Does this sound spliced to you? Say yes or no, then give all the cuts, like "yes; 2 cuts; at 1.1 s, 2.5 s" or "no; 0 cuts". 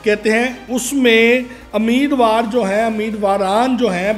no; 0 cuts